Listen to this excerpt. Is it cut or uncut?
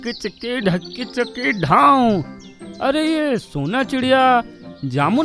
uncut